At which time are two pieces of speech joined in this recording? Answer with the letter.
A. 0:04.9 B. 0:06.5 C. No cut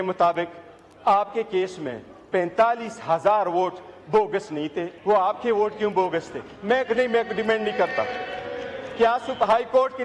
A